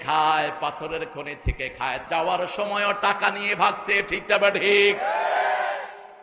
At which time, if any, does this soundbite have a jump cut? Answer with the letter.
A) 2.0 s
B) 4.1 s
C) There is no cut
A